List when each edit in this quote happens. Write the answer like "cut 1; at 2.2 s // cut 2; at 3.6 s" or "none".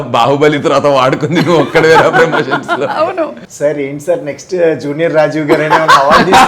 cut 1; at 3.4 s

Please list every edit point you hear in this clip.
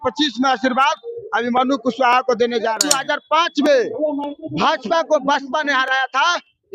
cut 1; at 2.9 s

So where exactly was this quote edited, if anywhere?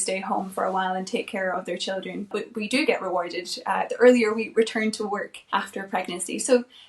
cut 1; at 2.3 s // cut 2; at 5.3 s

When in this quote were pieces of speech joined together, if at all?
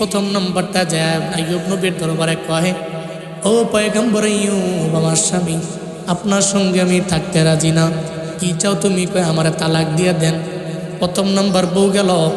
none

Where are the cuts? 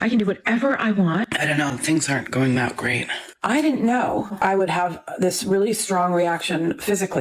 cut 1; at 1.3 s // cut 2; at 4.3 s

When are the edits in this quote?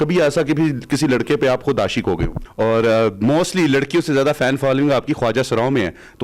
cut 1; at 2.4 s

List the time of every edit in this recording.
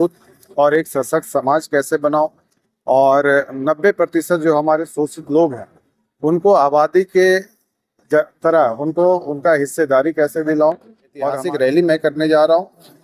cut 1; at 11.4 s

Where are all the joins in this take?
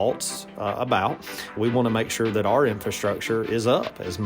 cut 1; at 1.6 s

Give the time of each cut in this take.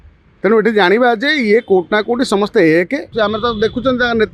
cut 1; at 3.1 s

